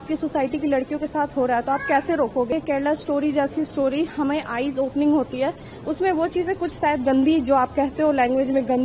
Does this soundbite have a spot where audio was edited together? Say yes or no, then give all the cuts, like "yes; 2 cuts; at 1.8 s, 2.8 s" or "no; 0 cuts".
yes; 1 cut; at 2.5 s